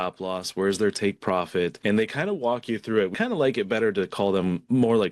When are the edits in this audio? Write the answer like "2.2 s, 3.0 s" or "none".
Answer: 1.8 s, 3.1 s